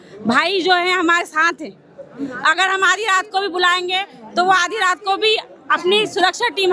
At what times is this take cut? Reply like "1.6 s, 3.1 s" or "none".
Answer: none